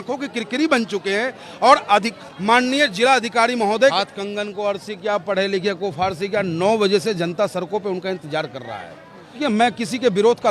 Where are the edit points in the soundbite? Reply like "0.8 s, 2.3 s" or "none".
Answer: 3.9 s, 9.4 s